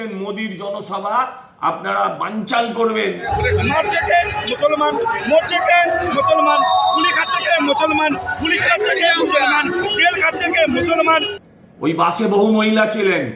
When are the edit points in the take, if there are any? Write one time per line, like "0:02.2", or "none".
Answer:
0:03.3
0:11.4